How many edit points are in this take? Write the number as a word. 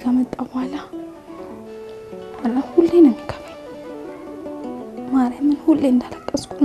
four